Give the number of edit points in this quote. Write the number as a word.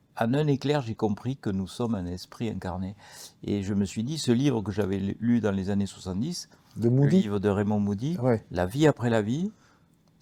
zero